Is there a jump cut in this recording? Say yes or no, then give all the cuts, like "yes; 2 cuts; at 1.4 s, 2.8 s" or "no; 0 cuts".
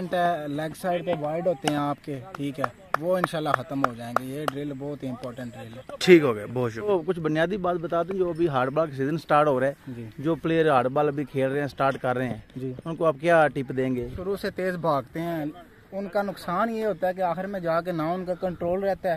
yes; 2 cuts; at 6.9 s, 14.2 s